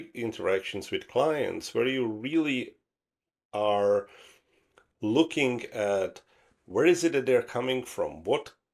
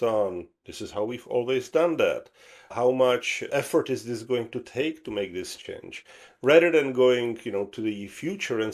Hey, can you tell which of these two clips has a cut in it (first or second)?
second